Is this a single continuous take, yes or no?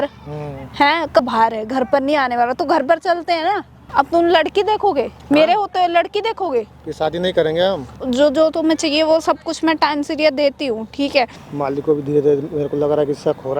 no